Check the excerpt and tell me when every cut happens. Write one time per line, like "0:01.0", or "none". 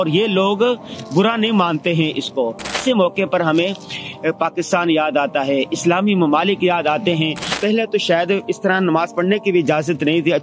0:02.8
0:07.5